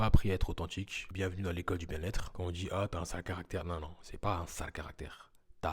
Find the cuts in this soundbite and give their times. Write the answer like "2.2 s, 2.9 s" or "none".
1.0 s, 2.3 s